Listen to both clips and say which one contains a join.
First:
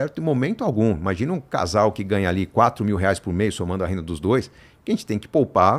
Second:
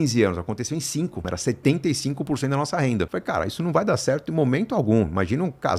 second; 2 cuts; at 1.2 s, 3.1 s

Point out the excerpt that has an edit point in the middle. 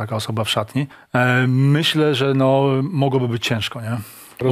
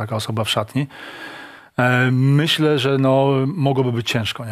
first; 1 cut; at 1.0 s

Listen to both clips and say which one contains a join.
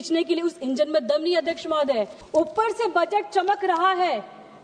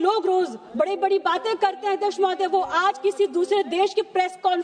first; 1 cut; at 2.2 s

